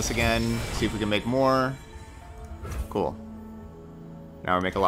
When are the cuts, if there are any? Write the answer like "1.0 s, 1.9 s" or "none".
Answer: none